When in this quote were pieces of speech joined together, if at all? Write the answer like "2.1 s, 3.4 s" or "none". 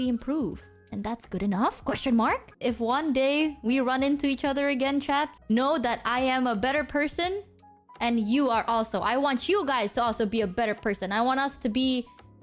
2.5 s